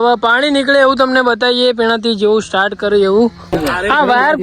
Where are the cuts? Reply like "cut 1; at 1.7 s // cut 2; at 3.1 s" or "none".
cut 1; at 3.4 s